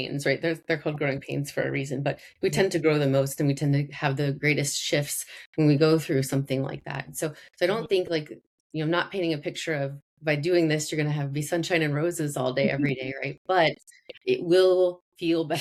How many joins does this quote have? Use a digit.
0